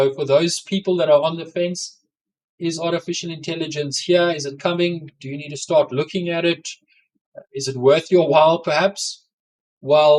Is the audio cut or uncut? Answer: uncut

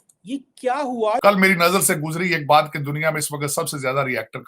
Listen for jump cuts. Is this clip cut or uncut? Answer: cut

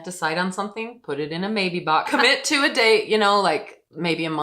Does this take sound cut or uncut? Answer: cut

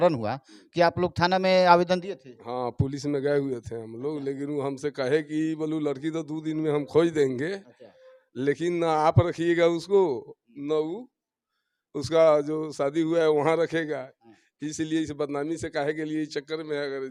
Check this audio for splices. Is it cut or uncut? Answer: uncut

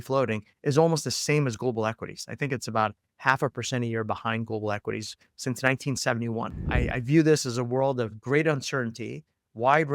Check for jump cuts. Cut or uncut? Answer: cut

